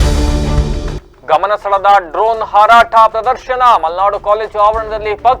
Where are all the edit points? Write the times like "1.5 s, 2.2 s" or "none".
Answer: 1.0 s